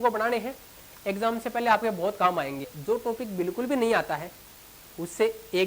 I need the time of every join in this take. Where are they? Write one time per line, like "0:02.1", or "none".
0:02.7